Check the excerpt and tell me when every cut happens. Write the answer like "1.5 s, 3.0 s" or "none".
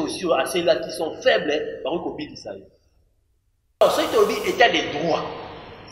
3.8 s